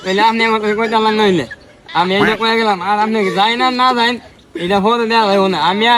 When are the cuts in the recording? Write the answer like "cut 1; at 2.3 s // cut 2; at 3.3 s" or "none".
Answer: none